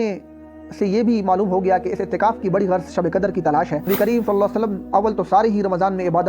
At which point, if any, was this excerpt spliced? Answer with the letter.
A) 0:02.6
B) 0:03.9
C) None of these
B